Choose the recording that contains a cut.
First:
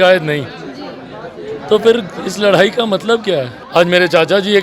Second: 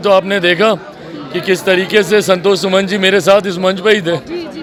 first; 1 cut; at 3.6 s

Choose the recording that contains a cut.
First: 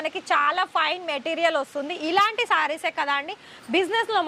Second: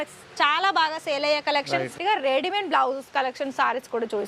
second; 1 cut; at 1.9 s

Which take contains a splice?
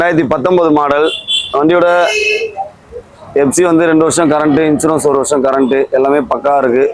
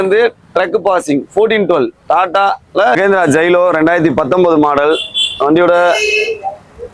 second; 1 cut; at 2.9 s

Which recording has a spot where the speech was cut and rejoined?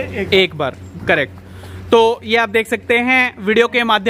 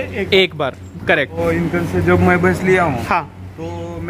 second; 1 cut; at 1.3 s

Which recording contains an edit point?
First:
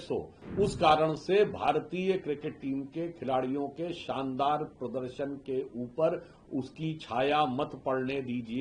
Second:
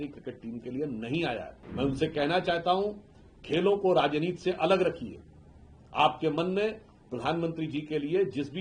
second; 1 cut; at 1.6 s

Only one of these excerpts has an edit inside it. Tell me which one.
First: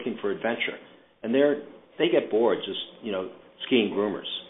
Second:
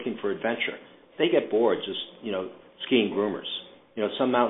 second; 1 cut; at 1.0 s

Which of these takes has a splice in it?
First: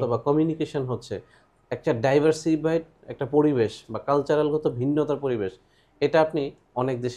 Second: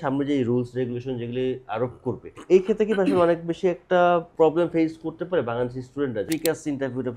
second; 3 cuts; at 2.3 s, 4.3 s, 6.3 s

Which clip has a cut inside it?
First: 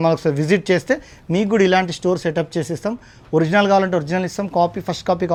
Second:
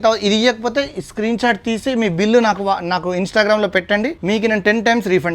second; 1 cut; at 4.2 s

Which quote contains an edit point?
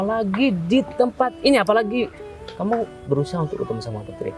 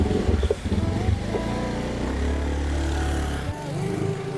second; 1 cut; at 3.5 s

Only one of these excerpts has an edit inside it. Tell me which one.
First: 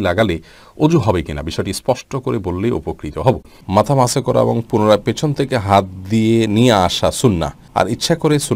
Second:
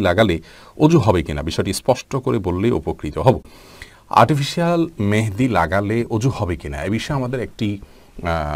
first; 2 cuts; at 3.5 s, 7.6 s

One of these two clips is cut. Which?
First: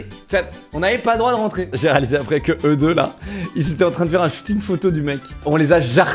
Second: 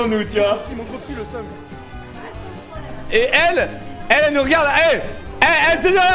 first; 1 cut; at 1.7 s

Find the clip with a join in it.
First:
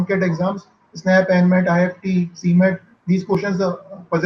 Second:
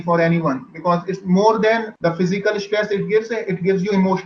second; 1 cut; at 1.9 s

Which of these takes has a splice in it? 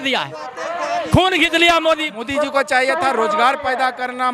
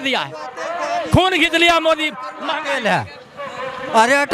first; 1 cut; at 2.2 s

